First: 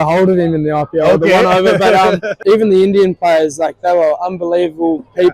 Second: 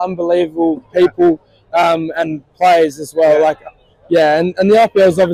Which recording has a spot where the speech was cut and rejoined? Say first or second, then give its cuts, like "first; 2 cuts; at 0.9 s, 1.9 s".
first; 1 cut; at 2.3 s